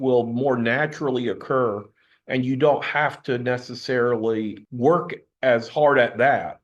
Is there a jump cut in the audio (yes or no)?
yes